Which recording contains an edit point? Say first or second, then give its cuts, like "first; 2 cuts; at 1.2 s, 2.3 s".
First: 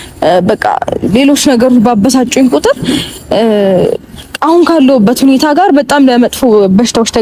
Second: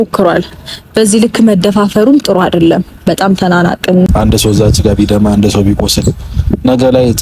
second; 1 cut; at 4.1 s